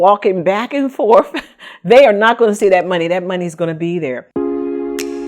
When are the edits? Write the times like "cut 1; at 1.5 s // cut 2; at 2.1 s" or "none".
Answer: cut 1; at 4.2 s